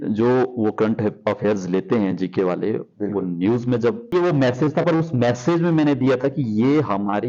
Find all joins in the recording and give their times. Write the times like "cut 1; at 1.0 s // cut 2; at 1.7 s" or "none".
cut 1; at 4.1 s